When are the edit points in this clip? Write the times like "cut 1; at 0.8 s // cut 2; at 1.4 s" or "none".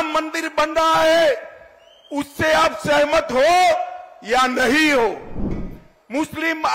cut 1; at 5.6 s